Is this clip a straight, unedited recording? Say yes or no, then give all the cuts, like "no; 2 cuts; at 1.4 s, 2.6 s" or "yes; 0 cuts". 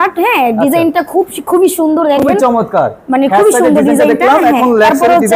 yes; 0 cuts